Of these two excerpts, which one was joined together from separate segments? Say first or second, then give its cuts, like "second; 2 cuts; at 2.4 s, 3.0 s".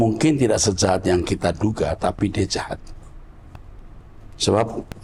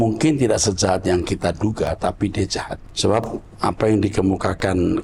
second; 1 cut; at 2.8 s